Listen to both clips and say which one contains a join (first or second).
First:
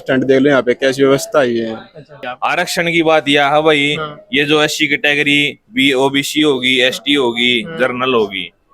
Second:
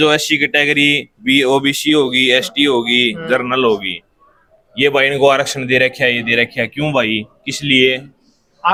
first